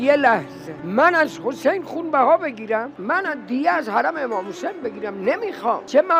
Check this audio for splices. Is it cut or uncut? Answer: uncut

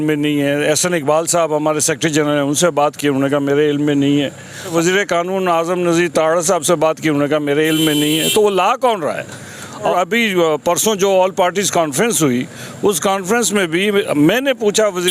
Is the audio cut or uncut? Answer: cut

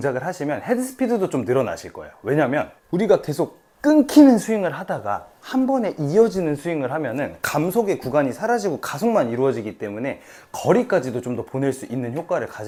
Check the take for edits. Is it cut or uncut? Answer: uncut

